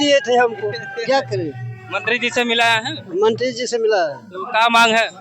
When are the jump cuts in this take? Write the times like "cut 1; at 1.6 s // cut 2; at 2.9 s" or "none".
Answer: none